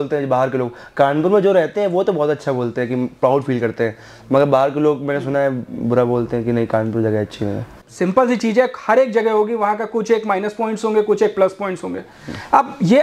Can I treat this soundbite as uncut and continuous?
no; 1 cut; at 7.7 s

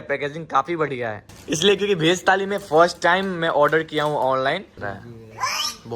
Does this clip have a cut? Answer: yes; 2 cuts; at 1.3 s, 4.7 s

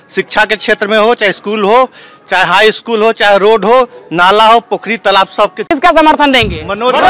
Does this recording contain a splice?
yes; 1 cut; at 5.6 s

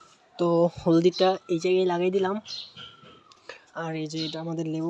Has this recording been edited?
no; 0 cuts

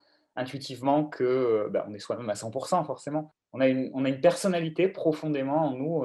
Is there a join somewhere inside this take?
yes; 1 cut; at 3.4 s

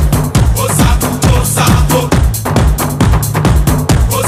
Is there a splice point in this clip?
no; 0 cuts

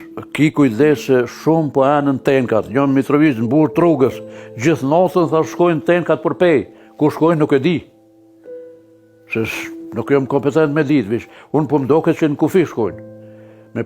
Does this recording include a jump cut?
yes; 2 cuts; at 7.8 s, 9.0 s

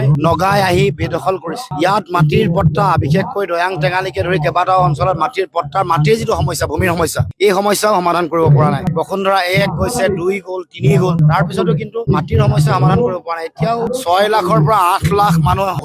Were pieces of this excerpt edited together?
no; 0 cuts

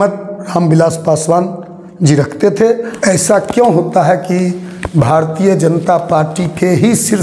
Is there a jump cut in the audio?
yes; 1 cut; at 2.9 s

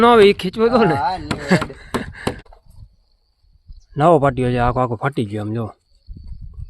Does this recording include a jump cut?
yes; 1 cut; at 2.4 s

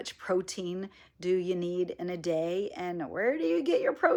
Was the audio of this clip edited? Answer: no; 0 cuts

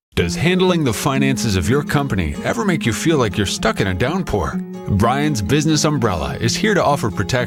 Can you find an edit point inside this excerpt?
no; 0 cuts

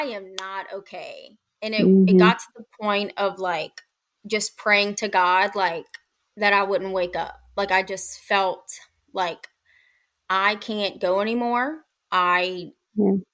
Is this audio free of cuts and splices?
yes; 0 cuts

